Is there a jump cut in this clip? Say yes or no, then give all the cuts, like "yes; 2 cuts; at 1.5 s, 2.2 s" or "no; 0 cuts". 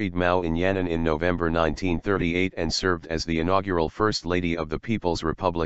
yes; 1 cut; at 3.1 s